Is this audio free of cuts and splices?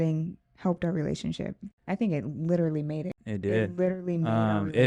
no; 2 cuts; at 1.6 s, 3.2 s

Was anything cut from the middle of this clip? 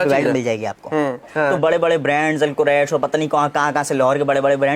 yes; 1 cut; at 1.3 s

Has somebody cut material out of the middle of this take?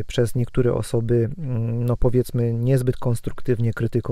no; 0 cuts

